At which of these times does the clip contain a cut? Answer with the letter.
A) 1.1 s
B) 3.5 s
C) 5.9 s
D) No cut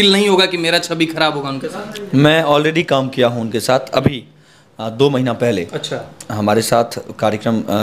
D